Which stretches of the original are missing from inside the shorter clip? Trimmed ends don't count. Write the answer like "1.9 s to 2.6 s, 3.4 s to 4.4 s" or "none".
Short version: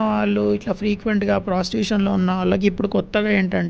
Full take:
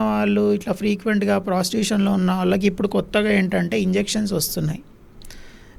none